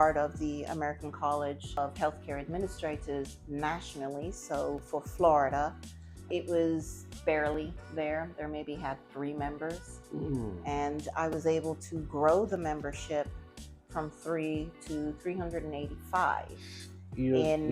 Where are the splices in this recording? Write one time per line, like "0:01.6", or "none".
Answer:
0:01.8
0:06.3
0:07.2